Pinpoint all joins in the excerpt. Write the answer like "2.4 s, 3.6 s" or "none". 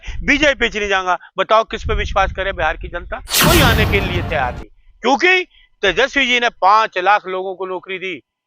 3.3 s